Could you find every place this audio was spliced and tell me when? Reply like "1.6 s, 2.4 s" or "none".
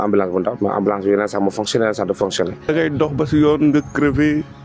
2.7 s